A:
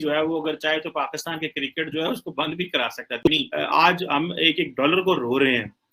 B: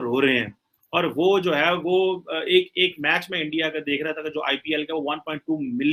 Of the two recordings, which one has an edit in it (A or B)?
A